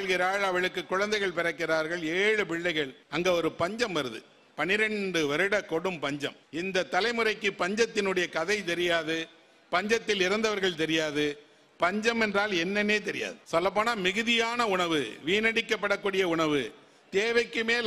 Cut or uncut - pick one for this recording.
cut